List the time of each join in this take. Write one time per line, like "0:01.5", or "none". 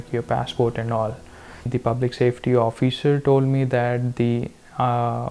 0:01.7